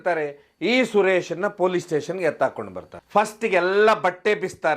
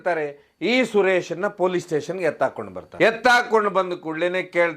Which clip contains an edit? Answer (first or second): first